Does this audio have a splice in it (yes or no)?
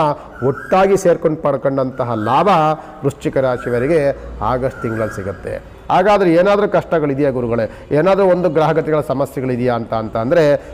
no